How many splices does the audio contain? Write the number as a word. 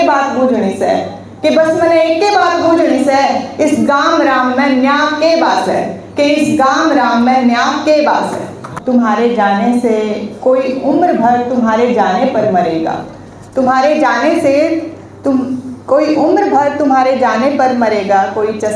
one